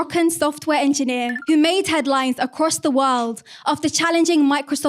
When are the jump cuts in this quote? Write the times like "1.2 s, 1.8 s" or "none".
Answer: 1.3 s